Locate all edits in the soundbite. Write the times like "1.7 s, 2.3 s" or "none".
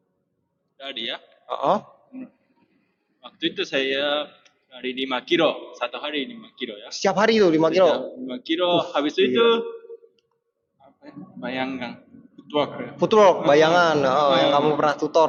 none